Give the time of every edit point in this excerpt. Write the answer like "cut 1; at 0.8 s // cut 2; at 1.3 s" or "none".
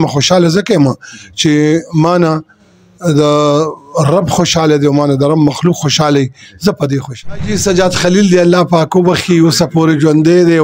cut 1; at 7.5 s